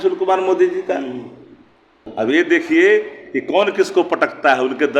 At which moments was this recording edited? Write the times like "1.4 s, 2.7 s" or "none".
2.0 s